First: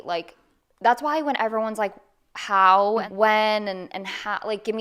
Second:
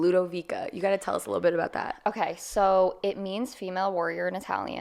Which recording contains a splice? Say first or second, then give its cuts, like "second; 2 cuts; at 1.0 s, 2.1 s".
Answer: first; 1 cut; at 3.1 s